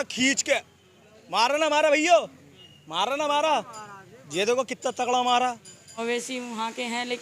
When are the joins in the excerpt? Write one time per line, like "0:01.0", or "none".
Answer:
0:06.0